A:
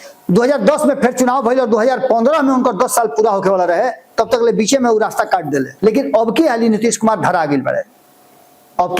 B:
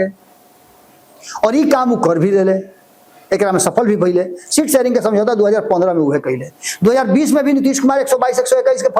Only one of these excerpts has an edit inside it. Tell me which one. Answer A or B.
A